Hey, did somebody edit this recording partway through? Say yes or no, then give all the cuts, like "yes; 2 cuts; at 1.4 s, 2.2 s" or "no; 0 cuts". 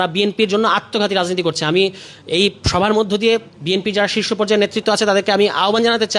no; 0 cuts